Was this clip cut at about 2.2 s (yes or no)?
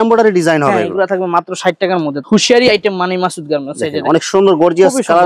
yes